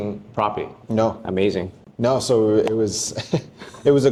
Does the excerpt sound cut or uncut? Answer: uncut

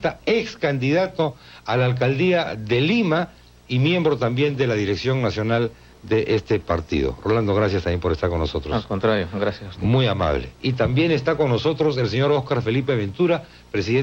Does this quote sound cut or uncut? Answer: cut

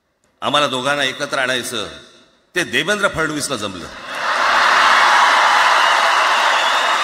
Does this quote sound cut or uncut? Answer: uncut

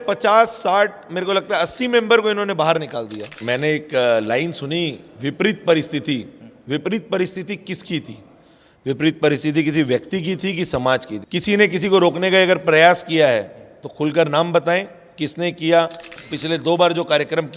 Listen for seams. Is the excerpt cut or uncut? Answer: cut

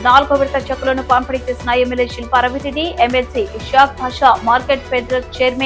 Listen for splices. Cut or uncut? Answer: uncut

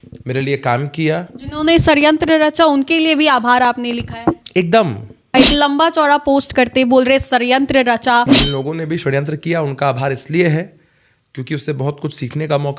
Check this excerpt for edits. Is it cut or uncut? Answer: cut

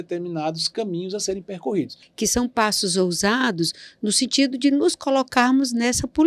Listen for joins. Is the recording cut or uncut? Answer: cut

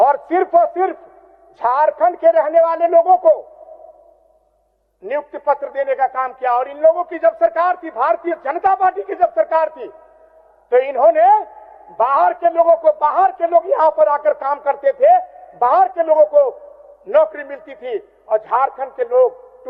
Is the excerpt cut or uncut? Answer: uncut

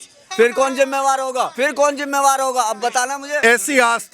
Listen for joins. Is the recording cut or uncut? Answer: cut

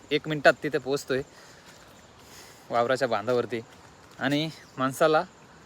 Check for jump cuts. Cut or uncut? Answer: uncut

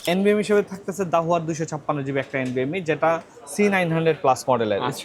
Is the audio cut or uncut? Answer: uncut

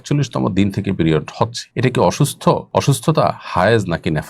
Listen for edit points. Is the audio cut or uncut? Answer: cut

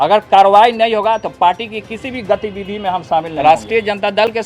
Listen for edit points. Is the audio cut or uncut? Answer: cut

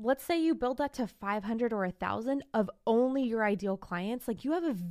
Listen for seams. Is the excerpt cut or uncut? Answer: uncut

